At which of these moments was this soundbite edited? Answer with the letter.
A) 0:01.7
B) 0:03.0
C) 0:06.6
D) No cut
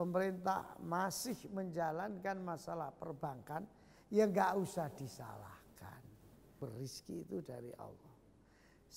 C